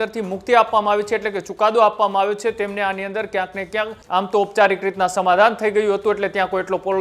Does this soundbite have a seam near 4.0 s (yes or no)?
yes